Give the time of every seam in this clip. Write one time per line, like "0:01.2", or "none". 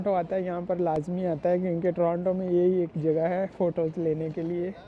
none